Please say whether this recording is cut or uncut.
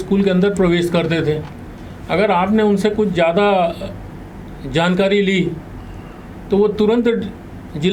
uncut